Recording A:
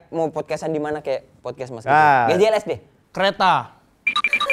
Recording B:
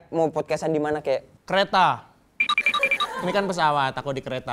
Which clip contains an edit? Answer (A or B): B